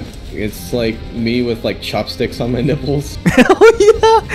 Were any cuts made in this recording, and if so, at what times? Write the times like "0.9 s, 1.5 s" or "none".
none